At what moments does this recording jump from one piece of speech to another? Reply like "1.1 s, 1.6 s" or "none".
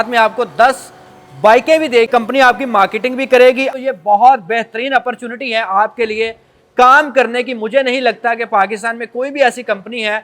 2.1 s, 3.7 s